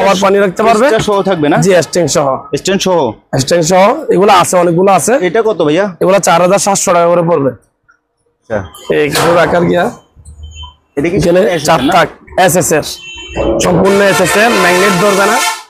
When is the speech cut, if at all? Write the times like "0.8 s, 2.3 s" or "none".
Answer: 8.5 s